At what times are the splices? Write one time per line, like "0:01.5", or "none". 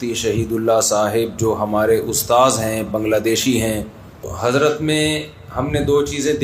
0:04.3